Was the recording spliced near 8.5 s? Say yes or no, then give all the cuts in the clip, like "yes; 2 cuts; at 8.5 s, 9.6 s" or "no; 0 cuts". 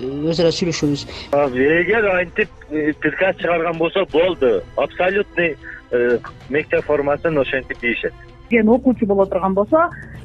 yes; 2 cuts; at 1.3 s, 8.5 s